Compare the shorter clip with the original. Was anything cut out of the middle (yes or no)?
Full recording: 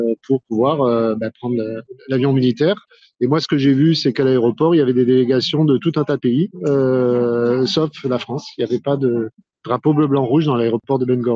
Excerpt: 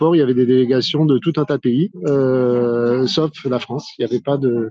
no